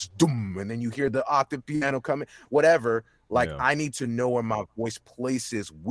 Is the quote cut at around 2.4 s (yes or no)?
no